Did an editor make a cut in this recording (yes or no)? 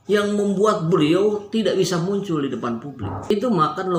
no